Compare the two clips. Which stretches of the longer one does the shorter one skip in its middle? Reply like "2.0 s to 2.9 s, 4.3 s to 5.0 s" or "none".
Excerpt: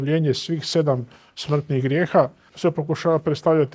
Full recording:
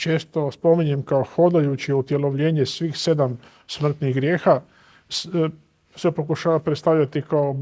4.8 s to 5.8 s